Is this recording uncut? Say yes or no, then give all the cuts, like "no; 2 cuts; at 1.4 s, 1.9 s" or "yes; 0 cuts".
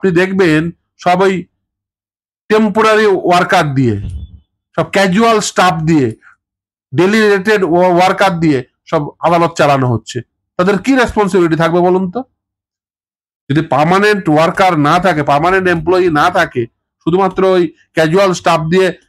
yes; 0 cuts